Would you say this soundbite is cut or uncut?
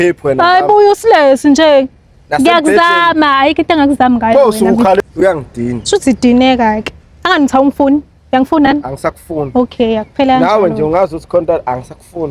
uncut